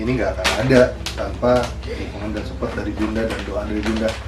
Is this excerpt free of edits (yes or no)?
yes